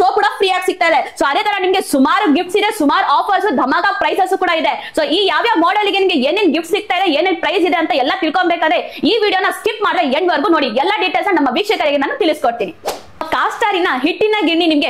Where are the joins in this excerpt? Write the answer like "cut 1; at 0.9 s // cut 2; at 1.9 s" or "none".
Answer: none